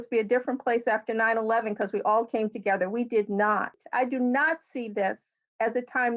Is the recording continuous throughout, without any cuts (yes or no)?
no